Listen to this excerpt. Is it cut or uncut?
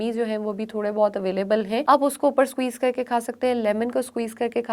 cut